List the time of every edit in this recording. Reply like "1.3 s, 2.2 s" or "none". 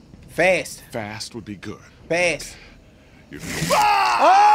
1.9 s